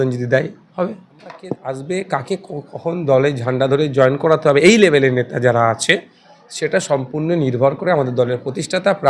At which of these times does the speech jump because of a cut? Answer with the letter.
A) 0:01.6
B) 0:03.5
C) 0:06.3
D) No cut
A